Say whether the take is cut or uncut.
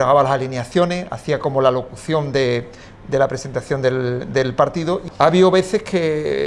cut